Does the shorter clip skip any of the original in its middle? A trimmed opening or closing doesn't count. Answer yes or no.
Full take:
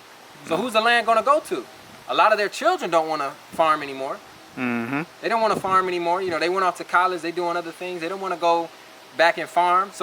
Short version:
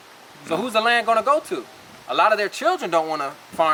no